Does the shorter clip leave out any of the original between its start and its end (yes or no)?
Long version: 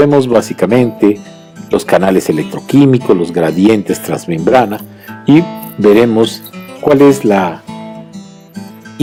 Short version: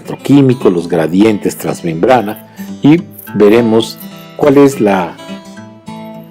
no